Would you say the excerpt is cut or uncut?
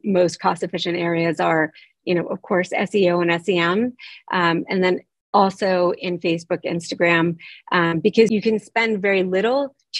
cut